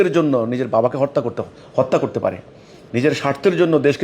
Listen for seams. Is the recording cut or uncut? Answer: uncut